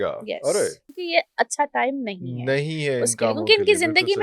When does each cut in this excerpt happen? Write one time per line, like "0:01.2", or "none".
0:00.9